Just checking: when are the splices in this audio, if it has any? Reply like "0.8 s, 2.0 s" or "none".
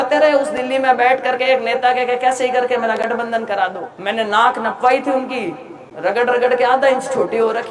3.9 s

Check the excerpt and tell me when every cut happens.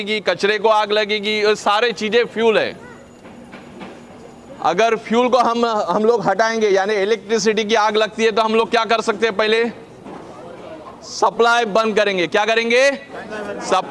none

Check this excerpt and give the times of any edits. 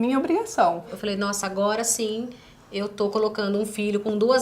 0.9 s

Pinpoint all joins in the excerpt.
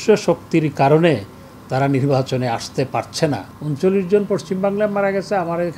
3.5 s

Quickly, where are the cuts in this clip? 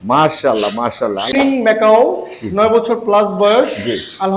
1.3 s

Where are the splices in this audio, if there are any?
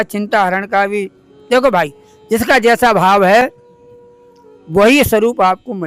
none

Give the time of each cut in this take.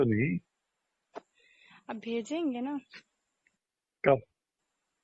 none

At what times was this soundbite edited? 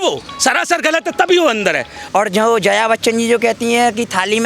2.1 s

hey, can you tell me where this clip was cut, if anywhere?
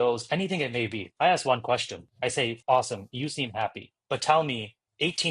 1.0 s, 2.5 s

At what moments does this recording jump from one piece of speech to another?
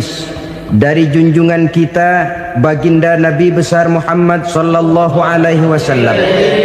none

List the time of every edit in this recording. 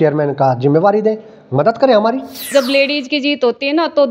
2.5 s

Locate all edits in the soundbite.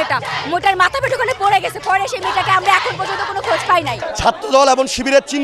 4.0 s

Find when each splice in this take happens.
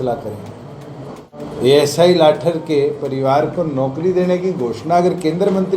1.4 s

